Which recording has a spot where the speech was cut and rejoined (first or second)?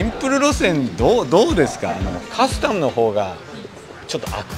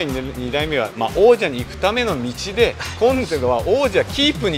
first